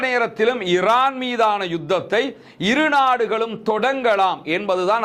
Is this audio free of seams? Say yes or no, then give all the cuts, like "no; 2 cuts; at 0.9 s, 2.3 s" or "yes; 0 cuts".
yes; 0 cuts